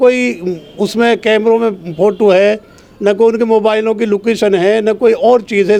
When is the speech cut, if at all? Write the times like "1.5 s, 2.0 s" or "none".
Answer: none